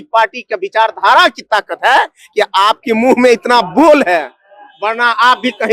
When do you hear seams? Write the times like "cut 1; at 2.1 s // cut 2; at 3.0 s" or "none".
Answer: none